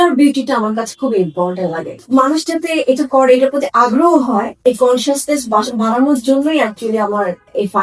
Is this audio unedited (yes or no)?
no